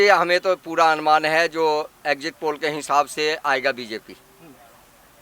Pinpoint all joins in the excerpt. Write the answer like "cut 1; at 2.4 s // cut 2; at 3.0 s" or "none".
none